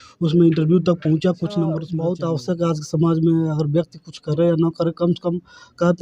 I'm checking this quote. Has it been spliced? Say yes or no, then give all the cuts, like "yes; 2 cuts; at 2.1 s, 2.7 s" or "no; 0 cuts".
yes; 1 cut; at 1.9 s